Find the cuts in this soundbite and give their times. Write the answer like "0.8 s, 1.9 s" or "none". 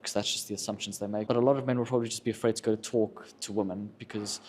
1.2 s